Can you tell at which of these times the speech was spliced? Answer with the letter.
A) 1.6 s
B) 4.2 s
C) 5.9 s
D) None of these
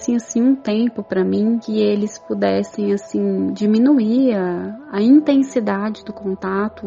A